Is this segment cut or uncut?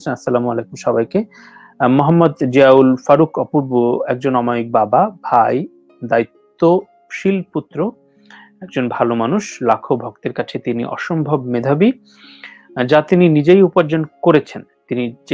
uncut